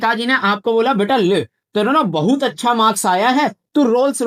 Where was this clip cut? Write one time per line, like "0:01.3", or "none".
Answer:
none

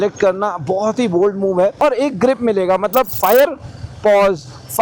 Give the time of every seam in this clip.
0:01.8
0:03.1

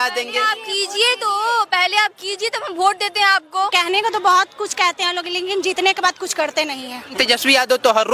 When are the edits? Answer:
0:03.7
0:07.1

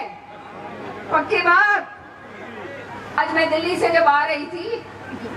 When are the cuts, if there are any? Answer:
0:03.2

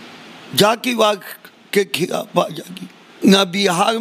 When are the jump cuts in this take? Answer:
0:03.0

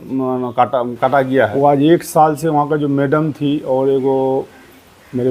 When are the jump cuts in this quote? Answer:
0:01.5

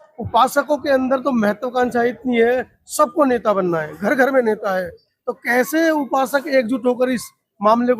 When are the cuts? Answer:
none

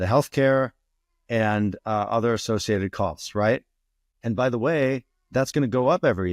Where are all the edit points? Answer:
0:04.0

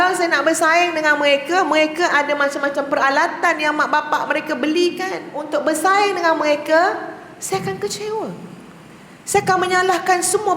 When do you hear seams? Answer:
0:05.4

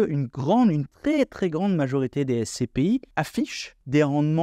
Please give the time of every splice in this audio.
0:03.3

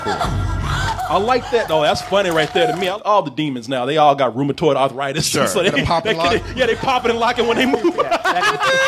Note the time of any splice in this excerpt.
0:02.9

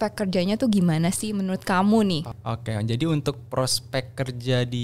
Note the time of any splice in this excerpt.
0:02.3

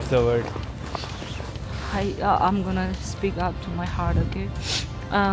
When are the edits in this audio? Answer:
0:01.3

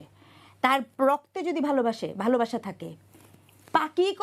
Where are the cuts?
none

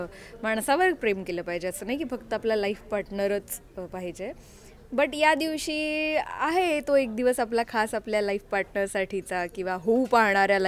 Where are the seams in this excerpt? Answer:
none

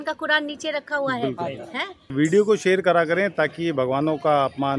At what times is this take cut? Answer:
0:02.1

